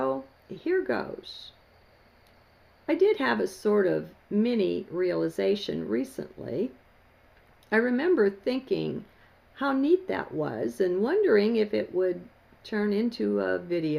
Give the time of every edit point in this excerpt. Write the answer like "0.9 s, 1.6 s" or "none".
none